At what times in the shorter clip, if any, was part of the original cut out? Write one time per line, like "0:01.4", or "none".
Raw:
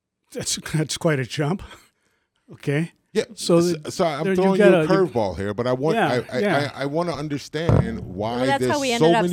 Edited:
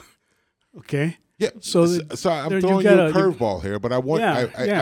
none